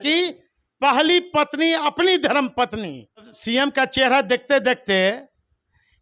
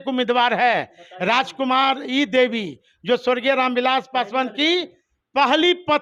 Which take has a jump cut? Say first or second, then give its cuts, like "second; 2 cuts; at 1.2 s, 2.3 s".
first; 1 cut; at 3.3 s